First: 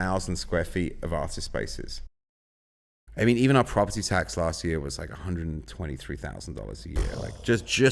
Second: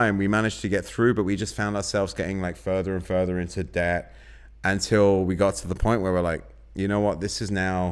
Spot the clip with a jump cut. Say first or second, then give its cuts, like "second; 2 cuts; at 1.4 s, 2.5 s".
first; 1 cut; at 2.7 s